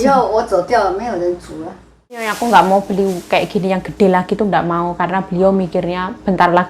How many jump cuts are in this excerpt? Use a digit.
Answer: 1